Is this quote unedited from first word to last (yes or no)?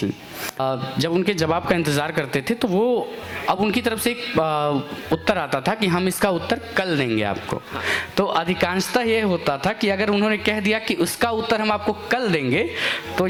yes